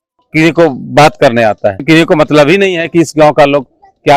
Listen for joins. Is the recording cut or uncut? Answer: cut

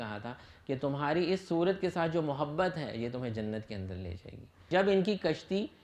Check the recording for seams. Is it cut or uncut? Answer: cut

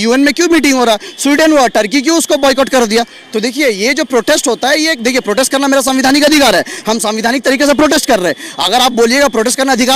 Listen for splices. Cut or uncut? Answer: uncut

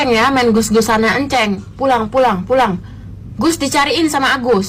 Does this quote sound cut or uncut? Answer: uncut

